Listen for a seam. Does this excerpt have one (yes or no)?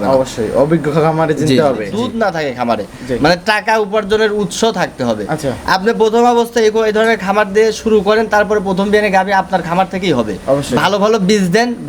yes